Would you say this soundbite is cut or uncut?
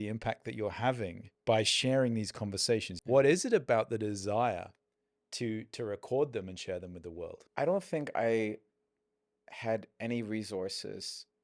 cut